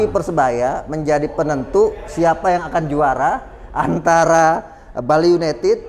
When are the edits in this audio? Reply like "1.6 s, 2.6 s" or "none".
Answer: none